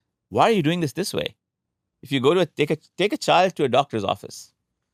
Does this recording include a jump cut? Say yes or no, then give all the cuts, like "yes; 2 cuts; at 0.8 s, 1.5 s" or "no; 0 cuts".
no; 0 cuts